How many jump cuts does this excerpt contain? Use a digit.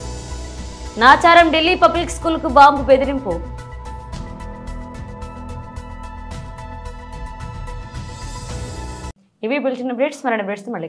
0